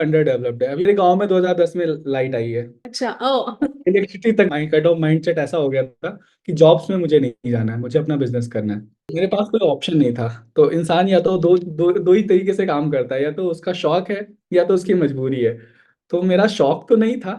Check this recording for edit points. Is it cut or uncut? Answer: cut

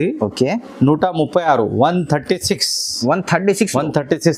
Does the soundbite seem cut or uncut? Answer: uncut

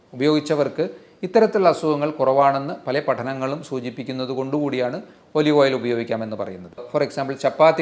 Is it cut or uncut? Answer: cut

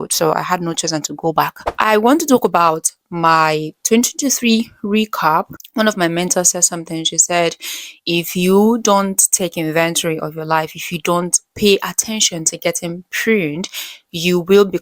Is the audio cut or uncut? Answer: cut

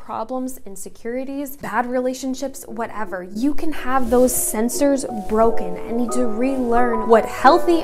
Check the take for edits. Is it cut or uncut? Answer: cut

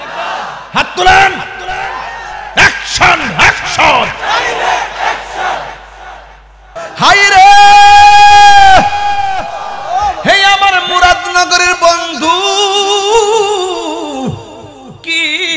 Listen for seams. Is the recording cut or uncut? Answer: cut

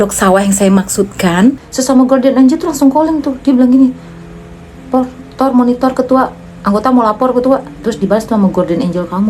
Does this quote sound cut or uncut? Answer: cut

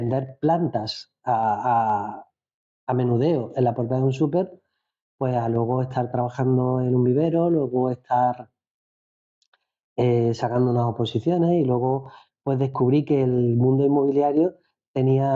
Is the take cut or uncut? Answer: uncut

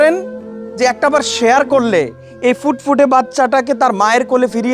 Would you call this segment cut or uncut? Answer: uncut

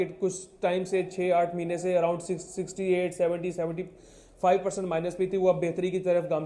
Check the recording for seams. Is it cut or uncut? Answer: uncut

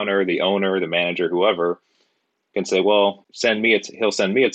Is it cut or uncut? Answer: cut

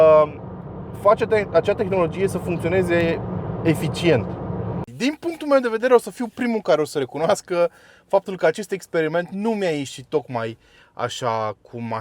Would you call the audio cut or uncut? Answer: cut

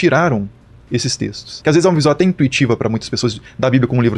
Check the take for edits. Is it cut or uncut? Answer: cut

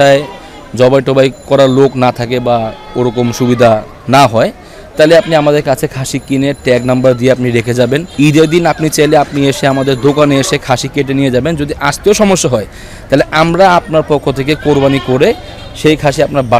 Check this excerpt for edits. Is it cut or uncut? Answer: uncut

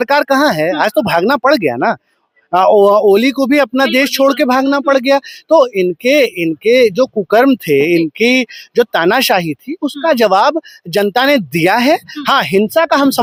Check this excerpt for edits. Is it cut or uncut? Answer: uncut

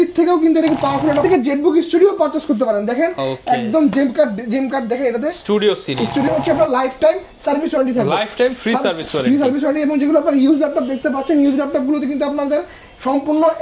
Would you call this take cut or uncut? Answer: cut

